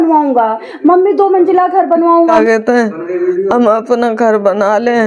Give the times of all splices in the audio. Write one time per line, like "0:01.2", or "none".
0:02.3